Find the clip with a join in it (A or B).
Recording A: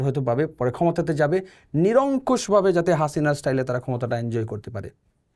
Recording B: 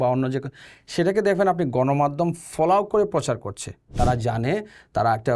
B